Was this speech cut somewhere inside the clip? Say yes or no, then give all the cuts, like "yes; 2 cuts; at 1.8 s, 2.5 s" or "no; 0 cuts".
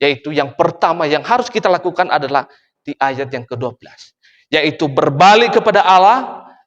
no; 0 cuts